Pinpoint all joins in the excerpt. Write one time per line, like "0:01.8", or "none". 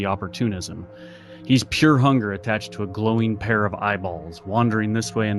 none